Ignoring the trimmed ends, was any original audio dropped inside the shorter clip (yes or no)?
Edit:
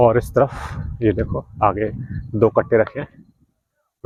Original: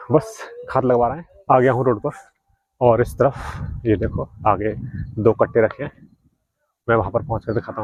no